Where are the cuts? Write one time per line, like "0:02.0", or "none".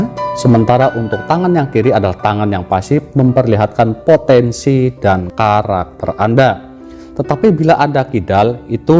none